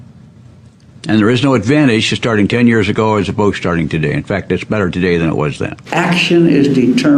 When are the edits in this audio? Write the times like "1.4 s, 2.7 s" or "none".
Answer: 5.8 s